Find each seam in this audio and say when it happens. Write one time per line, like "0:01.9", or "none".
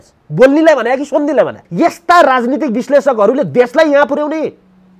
0:01.6

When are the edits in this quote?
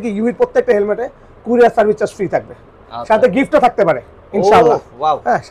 none

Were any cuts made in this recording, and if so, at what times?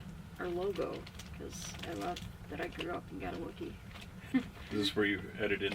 0:01.2
0:04.3

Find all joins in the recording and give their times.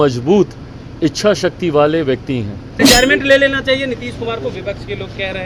0:02.8

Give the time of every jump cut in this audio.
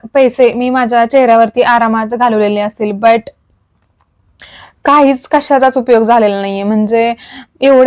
none

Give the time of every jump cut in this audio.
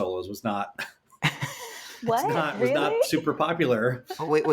none

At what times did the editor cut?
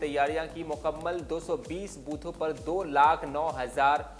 none

